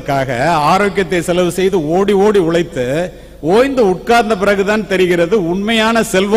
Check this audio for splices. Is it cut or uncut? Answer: uncut